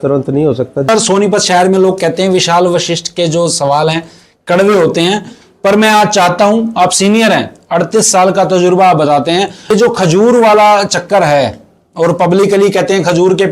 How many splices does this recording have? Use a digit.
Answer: 2